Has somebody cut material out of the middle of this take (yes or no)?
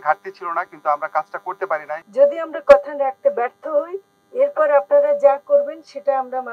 yes